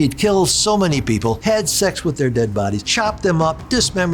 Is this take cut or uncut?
cut